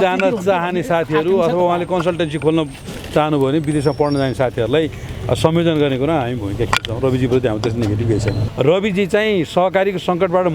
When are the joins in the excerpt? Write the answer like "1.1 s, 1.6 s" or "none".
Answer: 8.3 s